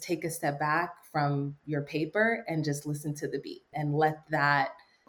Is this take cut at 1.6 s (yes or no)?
no